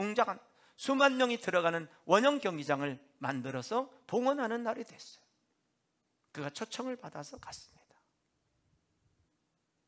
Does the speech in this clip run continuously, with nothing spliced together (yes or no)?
yes